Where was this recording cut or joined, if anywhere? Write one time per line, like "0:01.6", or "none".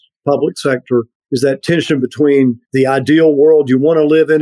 0:01.2
0:02.6